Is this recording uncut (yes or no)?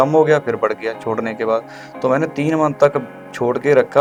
yes